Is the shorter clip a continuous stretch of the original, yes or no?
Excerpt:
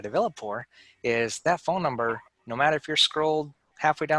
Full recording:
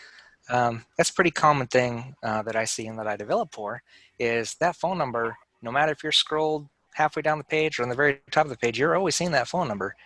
yes